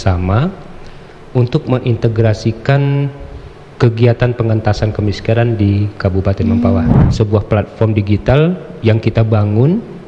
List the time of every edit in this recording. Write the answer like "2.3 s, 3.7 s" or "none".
7.0 s